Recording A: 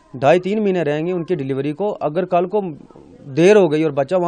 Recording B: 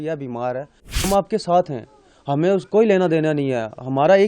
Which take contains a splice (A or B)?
B